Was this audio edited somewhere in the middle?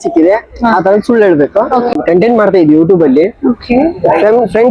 yes; 1 cut; at 1.9 s

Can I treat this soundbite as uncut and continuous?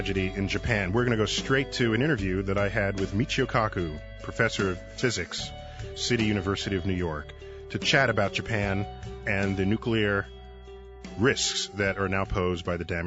yes; 0 cuts

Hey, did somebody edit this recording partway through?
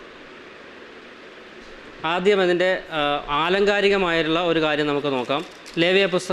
no; 0 cuts

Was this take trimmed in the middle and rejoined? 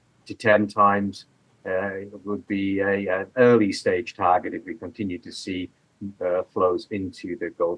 no; 0 cuts

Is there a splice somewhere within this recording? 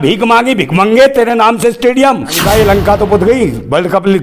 yes; 1 cut; at 2.4 s

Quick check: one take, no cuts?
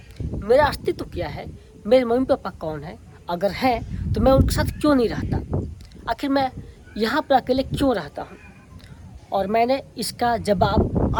yes; 0 cuts

